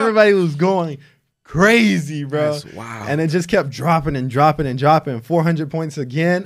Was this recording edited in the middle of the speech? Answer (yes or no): no